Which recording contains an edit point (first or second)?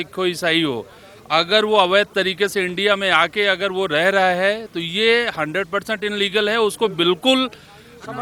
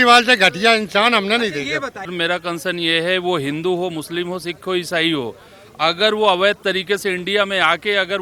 second